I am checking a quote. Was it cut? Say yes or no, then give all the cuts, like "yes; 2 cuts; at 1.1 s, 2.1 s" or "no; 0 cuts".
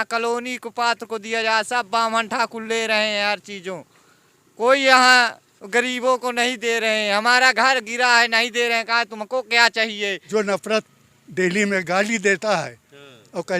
yes; 1 cut; at 10.2 s